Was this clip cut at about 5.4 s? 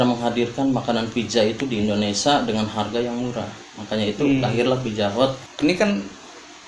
yes; 1 cut; at 5.4 s

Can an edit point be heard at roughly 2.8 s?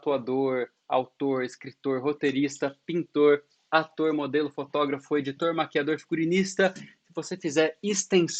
no; 0 cuts

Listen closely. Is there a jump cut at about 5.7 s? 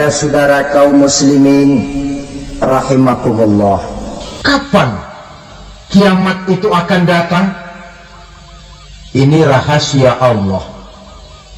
no; 1 cut; at 4.0 s

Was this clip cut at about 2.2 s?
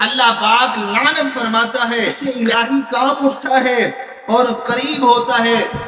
yes; 1 cut; at 2.2 s

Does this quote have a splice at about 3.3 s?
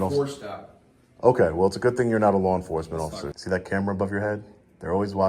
yes; 1 cut; at 3.3 s

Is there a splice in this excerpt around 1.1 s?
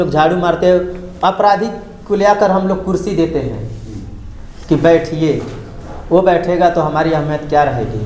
no; 0 cuts

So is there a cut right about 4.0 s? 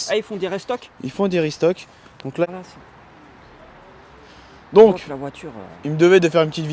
no; 1 cut; at 2.4 s

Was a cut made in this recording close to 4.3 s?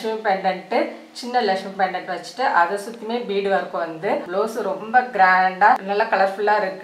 yes; 2 cuts; at 4.3 s, 5.8 s

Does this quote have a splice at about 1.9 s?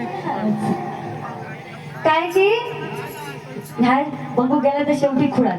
no; 0 cuts

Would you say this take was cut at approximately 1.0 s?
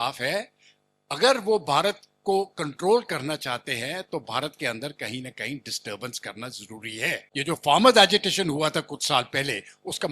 no; 1 cut; at 7.3 s

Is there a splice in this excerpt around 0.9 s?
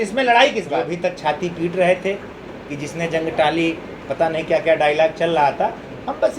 yes; 1 cut; at 0.9 s

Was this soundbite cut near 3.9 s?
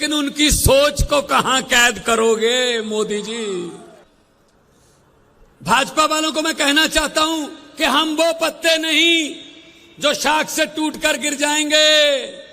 yes; 1 cut; at 3.9 s

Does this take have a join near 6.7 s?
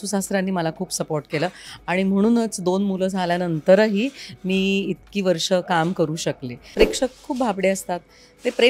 yes; 1 cut; at 6.7 s

